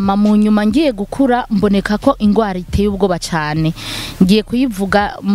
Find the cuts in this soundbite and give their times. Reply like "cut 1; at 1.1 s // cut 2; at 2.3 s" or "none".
none